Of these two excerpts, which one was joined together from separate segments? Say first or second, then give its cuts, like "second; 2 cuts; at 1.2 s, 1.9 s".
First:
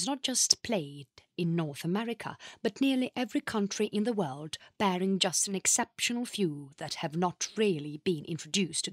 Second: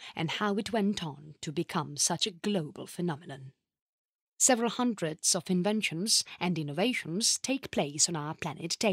second; 1 cut; at 2.5 s